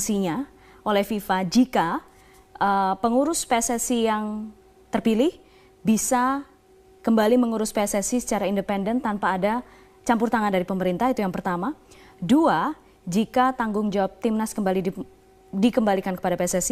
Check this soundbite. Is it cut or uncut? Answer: uncut